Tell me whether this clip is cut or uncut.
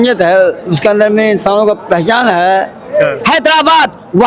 cut